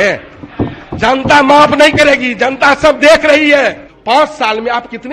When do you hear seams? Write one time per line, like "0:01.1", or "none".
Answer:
0:03.9